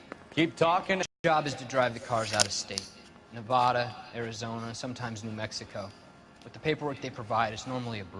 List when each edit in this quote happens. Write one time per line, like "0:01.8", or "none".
0:01.1